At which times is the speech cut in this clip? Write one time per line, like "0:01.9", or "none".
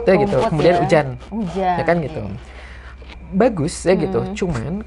none